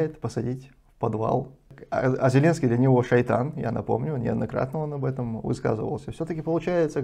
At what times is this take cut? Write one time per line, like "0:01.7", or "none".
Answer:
0:01.8